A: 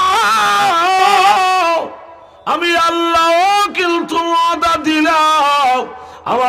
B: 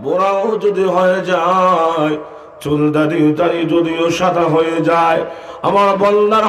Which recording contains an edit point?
A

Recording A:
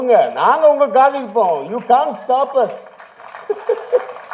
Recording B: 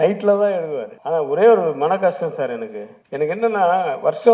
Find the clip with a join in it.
B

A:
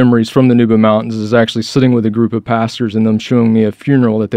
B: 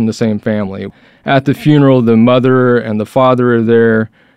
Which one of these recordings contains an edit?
B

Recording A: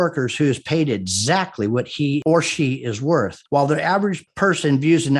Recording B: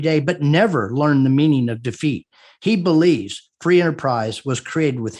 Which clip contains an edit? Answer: A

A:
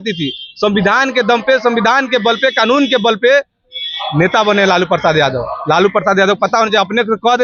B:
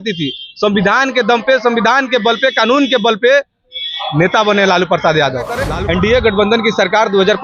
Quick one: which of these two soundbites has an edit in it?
B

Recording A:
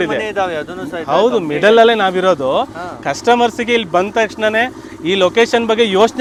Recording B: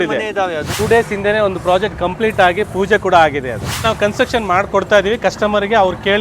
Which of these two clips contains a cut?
B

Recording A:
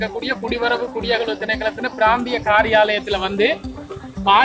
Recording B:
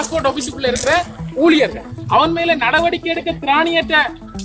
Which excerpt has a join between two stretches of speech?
B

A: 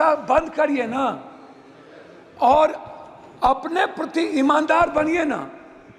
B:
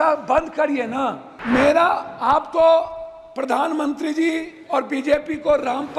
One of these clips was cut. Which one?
B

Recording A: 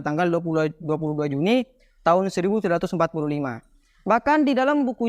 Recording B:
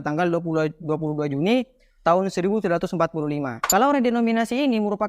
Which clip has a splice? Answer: B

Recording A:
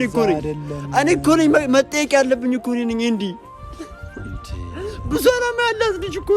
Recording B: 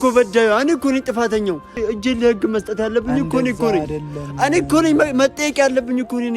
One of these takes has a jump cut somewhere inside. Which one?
B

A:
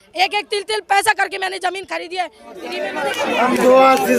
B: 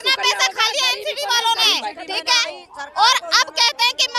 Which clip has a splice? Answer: A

